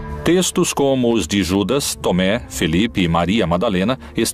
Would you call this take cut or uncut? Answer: cut